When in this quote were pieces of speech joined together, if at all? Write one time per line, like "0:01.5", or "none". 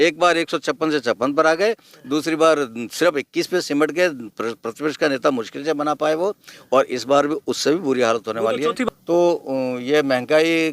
0:08.9